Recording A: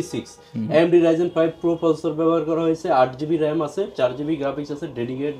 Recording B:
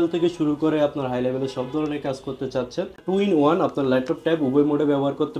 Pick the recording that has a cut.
B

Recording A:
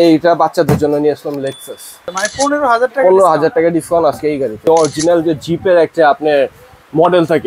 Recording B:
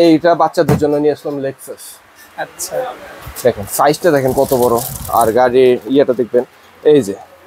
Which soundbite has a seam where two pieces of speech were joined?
A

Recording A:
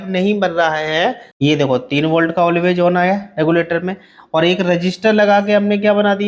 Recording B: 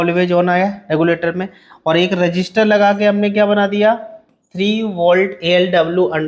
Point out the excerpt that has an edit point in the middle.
A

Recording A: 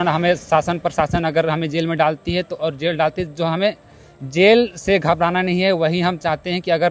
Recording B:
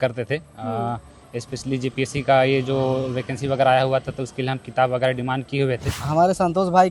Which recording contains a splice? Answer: B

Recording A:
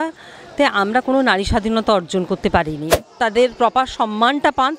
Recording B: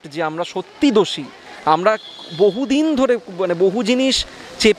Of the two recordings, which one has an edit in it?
A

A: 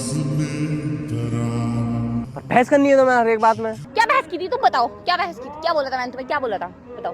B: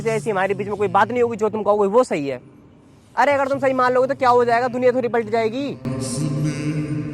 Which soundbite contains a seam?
A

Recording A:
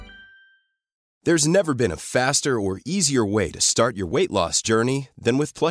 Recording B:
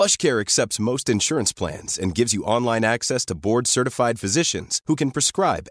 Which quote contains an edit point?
A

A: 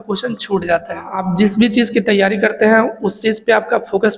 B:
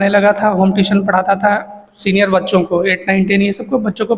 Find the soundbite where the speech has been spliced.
A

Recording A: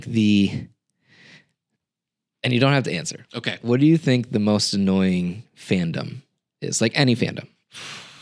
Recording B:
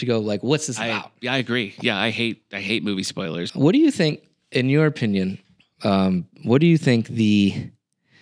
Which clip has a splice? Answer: B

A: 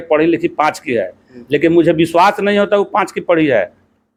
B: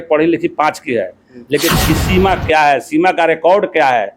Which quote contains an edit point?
B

